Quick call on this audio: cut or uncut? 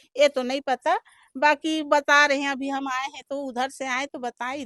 uncut